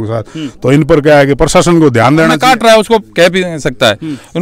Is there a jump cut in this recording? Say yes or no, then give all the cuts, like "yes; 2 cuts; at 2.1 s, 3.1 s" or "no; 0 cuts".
yes; 1 cut; at 2.4 s